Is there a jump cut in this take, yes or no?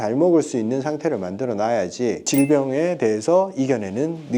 yes